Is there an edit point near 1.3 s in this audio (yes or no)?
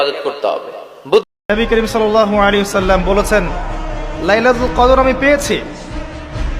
yes